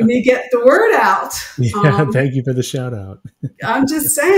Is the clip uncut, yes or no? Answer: yes